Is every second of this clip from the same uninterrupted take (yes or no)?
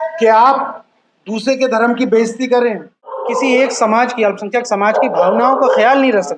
no